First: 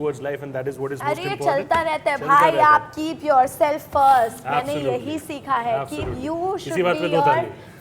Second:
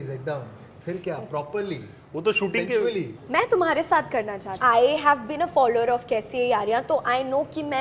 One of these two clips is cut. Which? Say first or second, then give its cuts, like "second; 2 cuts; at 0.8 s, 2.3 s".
second; 2 cuts; at 3.2 s, 4.5 s